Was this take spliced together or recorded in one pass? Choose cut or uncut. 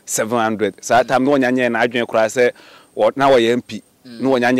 uncut